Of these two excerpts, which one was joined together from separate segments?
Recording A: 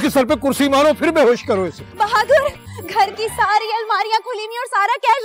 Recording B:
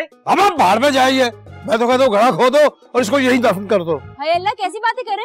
A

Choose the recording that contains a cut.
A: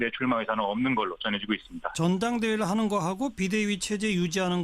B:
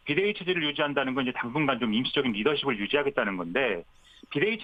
A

